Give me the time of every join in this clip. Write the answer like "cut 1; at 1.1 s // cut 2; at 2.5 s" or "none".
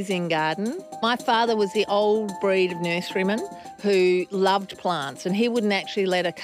cut 1; at 1.0 s